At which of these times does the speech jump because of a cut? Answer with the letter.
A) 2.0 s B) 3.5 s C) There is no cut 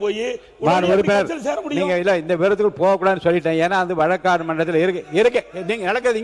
C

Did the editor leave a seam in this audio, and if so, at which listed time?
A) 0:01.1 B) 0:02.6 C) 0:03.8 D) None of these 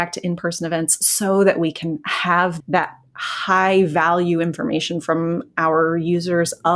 B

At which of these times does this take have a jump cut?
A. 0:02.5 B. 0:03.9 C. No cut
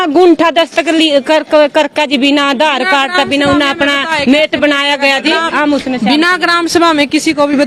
C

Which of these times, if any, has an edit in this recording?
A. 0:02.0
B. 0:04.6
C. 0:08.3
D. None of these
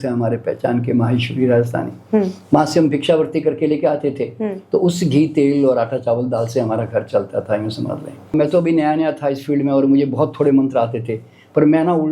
C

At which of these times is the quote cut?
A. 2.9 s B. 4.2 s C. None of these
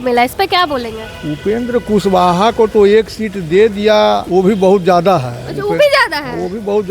B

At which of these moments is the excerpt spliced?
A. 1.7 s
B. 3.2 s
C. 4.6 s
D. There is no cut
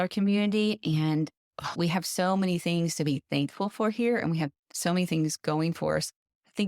A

